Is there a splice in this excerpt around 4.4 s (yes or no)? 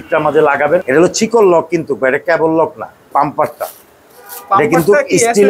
no